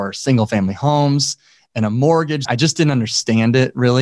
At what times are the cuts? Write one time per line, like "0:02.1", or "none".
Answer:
0:02.4